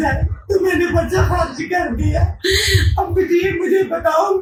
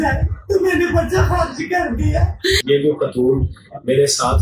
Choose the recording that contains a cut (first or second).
second